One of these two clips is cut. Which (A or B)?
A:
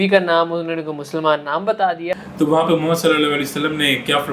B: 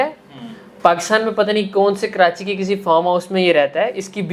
A